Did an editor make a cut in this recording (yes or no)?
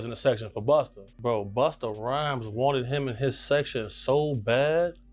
yes